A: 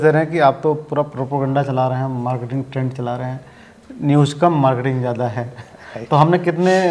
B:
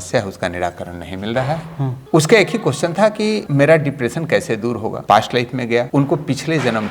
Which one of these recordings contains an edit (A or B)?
B